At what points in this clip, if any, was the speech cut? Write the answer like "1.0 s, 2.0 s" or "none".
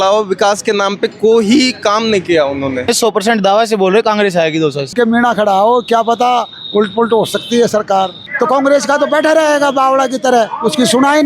2.9 s, 4.9 s, 8.2 s